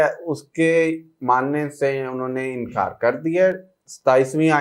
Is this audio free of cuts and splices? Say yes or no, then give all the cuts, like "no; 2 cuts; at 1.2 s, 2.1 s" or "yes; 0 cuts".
yes; 0 cuts